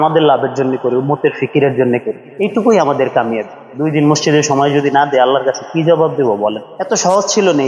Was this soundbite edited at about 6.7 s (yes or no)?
yes